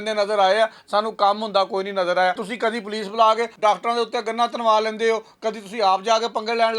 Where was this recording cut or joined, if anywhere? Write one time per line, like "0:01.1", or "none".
0:02.5
0:03.5